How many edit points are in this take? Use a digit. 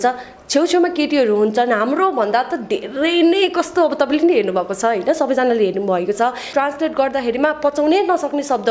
1